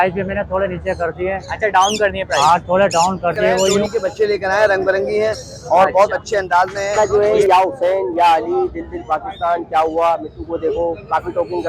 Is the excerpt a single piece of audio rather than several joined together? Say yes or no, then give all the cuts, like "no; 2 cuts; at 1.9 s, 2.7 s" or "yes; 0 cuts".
no; 2 cuts; at 3.8 s, 7.0 s